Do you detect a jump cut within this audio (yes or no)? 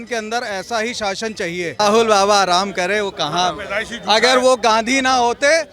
yes